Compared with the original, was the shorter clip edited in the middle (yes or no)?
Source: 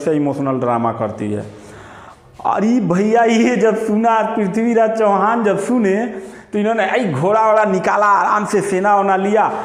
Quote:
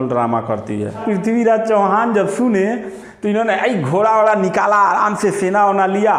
yes